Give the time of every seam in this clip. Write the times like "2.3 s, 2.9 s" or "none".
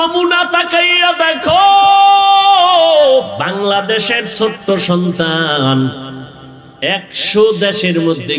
3.3 s